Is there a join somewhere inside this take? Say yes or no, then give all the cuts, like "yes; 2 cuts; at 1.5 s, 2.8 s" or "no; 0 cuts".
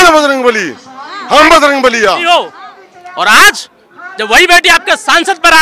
yes; 1 cut; at 2.3 s